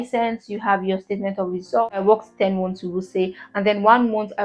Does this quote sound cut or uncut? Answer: cut